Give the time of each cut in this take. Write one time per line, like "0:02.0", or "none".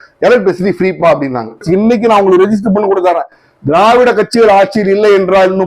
0:01.6